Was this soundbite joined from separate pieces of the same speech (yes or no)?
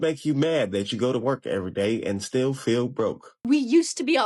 yes